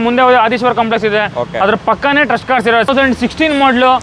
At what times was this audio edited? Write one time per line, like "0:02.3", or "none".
0:02.9